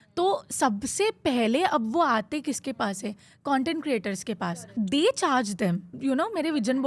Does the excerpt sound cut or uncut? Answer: cut